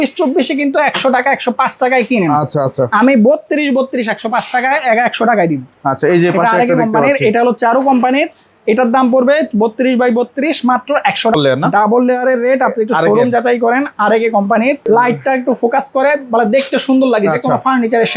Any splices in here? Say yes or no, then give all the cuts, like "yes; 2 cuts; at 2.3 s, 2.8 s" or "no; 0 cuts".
yes; 2 cuts; at 11.3 s, 14.8 s